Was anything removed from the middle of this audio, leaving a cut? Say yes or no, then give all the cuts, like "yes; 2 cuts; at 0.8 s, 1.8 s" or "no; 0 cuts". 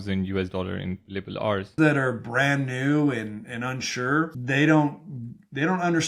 yes; 2 cuts; at 1.8 s, 4.4 s